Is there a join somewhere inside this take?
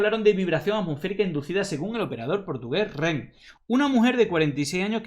yes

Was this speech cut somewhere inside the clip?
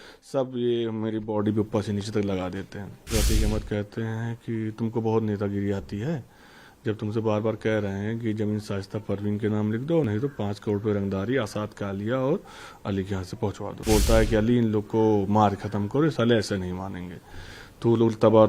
yes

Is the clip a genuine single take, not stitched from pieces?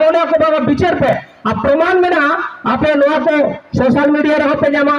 yes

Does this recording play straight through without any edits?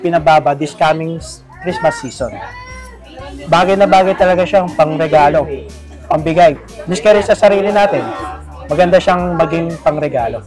yes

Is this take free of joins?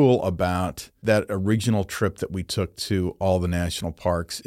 no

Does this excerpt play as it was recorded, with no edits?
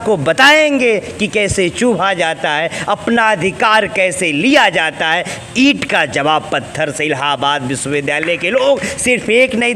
yes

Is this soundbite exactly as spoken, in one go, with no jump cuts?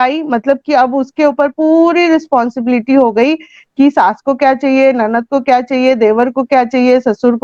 yes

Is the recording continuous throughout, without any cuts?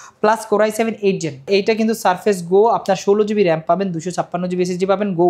no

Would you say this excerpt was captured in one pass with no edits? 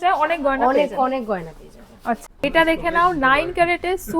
no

